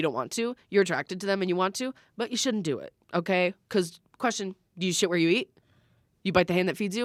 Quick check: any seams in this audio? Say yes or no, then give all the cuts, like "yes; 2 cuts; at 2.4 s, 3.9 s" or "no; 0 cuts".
no; 0 cuts